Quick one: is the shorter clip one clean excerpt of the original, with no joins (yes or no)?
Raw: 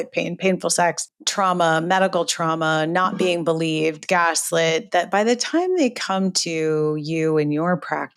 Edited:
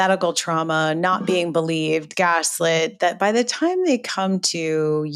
yes